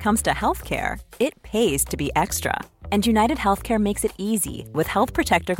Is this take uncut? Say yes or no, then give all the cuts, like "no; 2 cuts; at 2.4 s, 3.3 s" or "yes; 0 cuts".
yes; 0 cuts